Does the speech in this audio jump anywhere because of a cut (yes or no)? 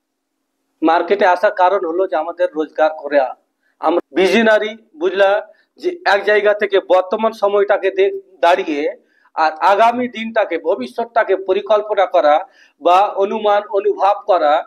yes